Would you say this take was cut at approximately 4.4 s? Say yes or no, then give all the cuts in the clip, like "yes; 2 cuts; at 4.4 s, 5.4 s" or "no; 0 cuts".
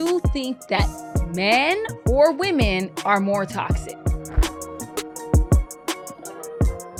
no; 0 cuts